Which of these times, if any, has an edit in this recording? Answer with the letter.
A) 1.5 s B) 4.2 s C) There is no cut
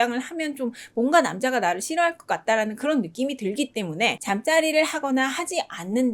B